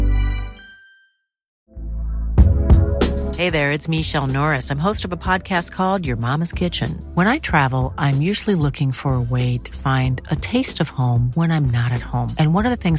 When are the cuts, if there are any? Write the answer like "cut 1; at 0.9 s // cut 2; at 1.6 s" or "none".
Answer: cut 1; at 1.6 s

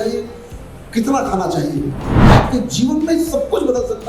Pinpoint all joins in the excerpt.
cut 1; at 2.2 s

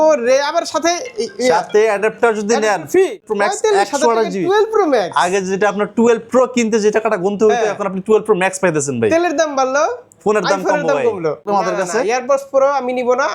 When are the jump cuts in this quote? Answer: cut 1; at 3.3 s // cut 2; at 11.4 s

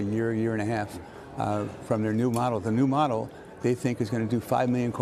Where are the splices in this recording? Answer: none

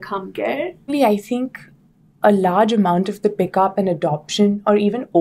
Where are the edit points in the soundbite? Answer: cut 1; at 0.9 s

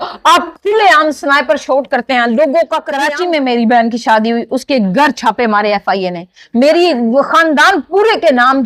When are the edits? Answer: cut 1; at 2.9 s

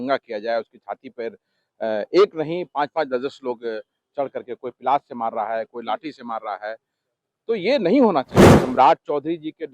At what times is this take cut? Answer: cut 1; at 8.6 s

